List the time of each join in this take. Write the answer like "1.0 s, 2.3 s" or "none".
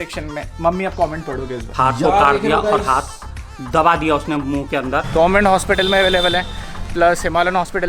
1.6 s, 5.0 s